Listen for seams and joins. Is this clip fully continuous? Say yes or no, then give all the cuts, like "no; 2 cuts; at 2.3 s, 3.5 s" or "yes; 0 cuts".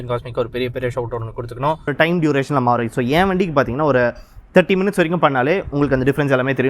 no; 1 cut; at 1.9 s